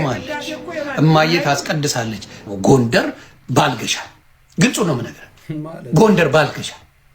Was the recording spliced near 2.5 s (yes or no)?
yes